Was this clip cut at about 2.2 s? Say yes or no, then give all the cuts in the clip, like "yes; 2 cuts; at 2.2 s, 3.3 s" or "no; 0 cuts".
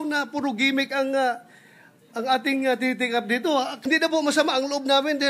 no; 1 cut; at 3.6 s